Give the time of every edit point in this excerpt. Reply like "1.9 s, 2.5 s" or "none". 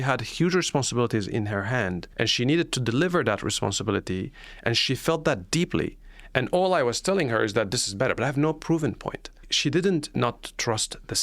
2.0 s, 9.5 s